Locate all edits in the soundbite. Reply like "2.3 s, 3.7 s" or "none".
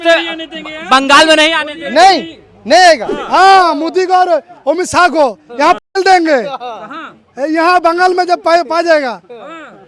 3.1 s